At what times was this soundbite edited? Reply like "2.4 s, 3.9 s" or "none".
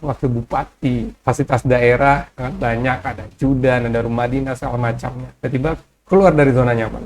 1.1 s, 2.4 s, 5.2 s